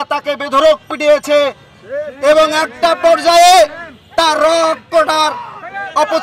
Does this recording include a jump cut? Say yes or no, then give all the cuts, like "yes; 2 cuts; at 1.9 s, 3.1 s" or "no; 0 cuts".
no; 0 cuts